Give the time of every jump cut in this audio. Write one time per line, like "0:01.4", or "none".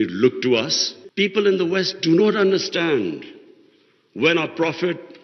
0:01.0